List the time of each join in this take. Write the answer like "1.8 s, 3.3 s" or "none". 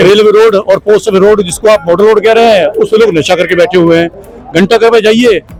none